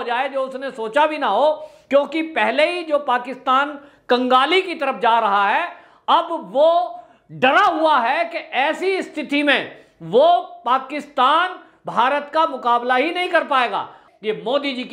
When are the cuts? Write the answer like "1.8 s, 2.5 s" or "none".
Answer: 14.0 s